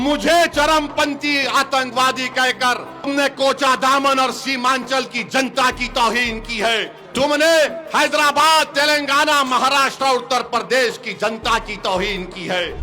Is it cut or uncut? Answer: cut